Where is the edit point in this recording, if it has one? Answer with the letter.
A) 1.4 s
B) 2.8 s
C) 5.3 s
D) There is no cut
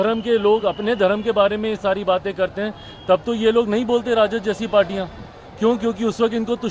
D